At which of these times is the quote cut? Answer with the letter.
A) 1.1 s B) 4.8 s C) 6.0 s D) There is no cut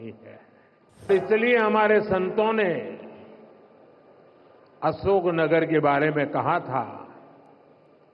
A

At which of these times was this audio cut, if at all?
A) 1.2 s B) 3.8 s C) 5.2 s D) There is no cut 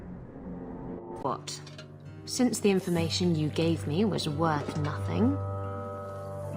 A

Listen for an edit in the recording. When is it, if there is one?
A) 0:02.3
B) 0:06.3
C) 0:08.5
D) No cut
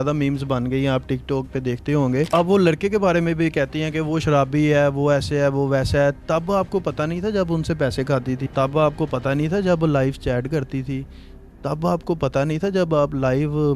A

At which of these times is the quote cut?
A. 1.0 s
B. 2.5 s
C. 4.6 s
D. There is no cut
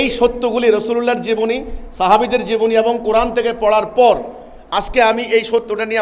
D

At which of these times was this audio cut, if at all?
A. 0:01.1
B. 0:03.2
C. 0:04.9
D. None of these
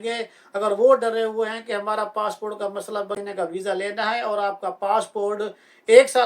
B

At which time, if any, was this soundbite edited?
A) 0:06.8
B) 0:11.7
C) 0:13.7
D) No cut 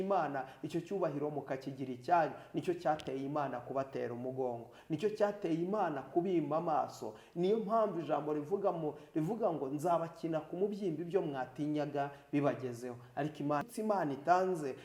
C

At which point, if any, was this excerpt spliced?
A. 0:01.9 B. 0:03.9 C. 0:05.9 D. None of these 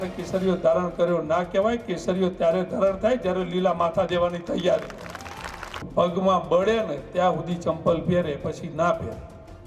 C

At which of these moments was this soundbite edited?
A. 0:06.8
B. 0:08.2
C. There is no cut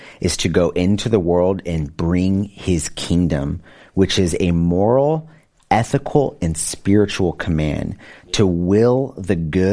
C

